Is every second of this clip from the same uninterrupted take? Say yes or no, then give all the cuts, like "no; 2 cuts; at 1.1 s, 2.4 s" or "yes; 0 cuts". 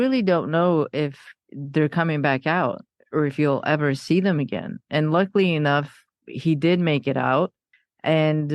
yes; 0 cuts